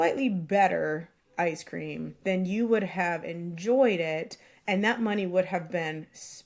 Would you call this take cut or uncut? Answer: uncut